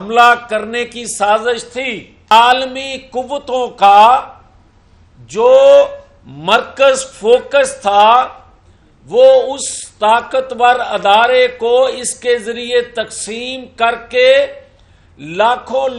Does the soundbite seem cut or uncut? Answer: cut